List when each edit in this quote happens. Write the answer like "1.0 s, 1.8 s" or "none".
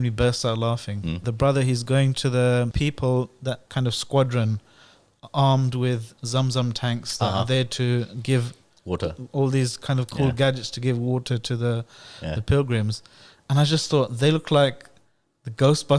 1.3 s, 2.7 s, 3.7 s